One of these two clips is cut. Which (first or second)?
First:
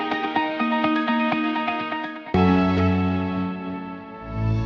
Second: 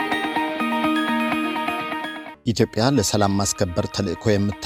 second